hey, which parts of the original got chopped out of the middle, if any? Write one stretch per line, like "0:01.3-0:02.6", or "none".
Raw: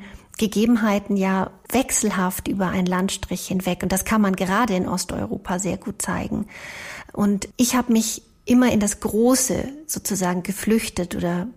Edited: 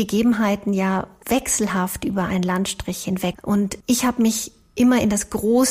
0:03.8-0:07.1

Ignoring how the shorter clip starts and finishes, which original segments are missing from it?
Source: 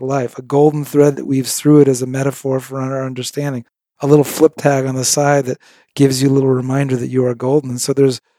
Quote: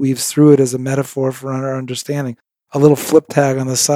none

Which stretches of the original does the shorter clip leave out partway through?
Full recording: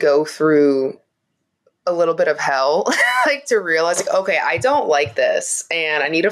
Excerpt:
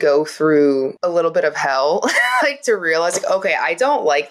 0:00.9-0:01.8

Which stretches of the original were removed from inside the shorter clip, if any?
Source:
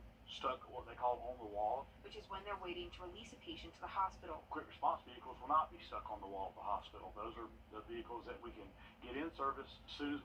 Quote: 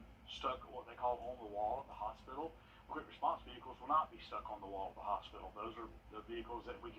0:02.5-0:04.1

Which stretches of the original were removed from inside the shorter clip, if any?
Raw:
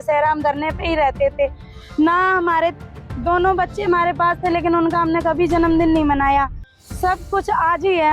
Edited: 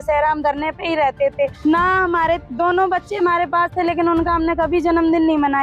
0:01.6-0:01.9
0:02.8-0:03.1

